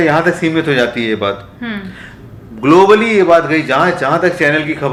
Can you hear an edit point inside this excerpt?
no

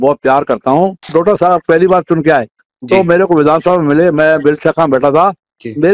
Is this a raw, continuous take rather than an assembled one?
no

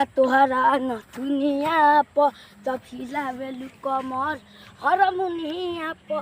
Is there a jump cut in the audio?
no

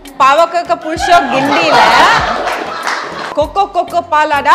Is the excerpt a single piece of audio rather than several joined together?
no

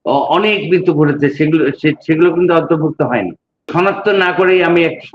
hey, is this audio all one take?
no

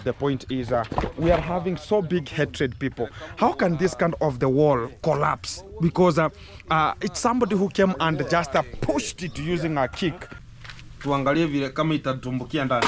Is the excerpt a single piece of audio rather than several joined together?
no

